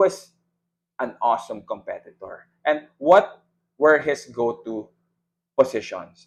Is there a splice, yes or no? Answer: no